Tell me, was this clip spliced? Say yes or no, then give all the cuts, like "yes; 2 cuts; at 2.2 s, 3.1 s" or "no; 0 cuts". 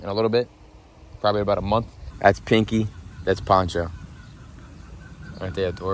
yes; 1 cut; at 2.1 s